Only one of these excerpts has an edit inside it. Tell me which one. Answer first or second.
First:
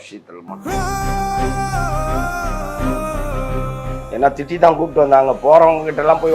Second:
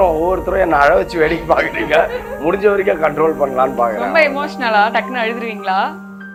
first